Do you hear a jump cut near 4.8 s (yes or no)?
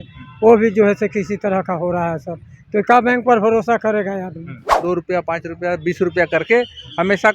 yes